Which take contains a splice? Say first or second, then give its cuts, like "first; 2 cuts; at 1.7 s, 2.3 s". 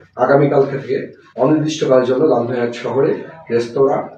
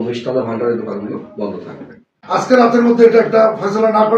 second; 1 cut; at 2.4 s